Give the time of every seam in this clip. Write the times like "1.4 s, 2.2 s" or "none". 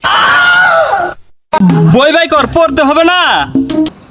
1.6 s